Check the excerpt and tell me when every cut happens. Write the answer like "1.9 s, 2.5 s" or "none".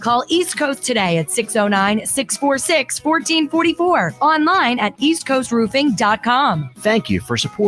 6.7 s